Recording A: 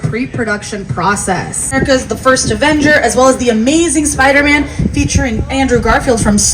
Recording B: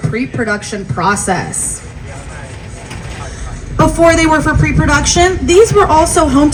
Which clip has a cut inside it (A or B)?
A